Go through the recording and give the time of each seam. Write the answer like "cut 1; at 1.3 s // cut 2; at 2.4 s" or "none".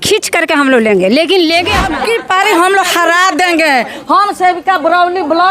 cut 1; at 1.9 s